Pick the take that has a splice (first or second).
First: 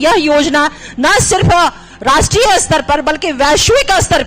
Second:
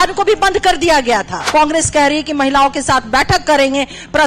second